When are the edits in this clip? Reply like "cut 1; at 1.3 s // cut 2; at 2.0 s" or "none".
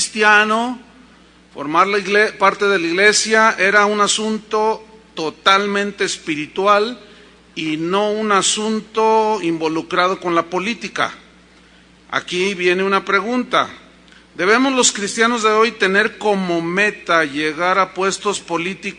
cut 1; at 14.5 s